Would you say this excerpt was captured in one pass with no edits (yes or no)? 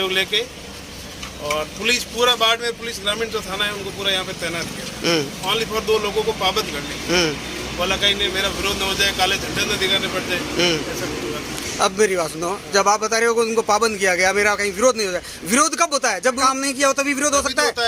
yes